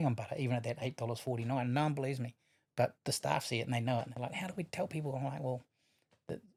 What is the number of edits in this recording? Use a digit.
0